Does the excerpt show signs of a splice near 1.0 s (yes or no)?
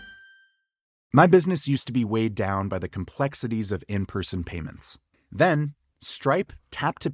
yes